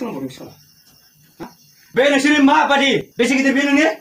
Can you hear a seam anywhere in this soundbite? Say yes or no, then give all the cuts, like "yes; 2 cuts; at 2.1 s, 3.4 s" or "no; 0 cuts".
yes; 2 cuts; at 1.4 s, 3.1 s